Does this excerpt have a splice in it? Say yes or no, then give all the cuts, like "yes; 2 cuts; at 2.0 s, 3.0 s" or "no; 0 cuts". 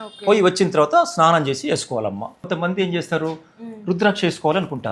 yes; 1 cut; at 2.4 s